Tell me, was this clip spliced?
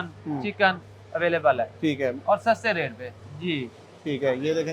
yes; 1 cut; at 3.3 s

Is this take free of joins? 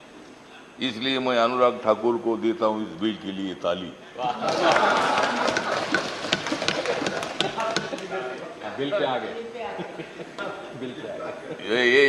yes; 0 cuts

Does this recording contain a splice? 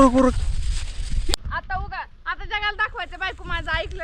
yes; 1 cut; at 1.4 s

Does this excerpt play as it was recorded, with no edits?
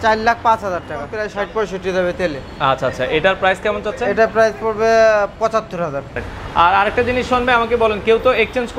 no; 2 cuts; at 1.2 s, 6.1 s

